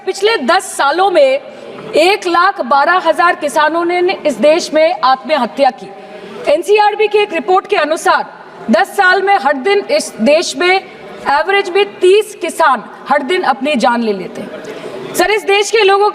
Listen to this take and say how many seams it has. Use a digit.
0